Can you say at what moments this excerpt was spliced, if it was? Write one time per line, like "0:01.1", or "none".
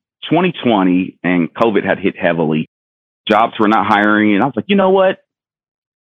0:03.0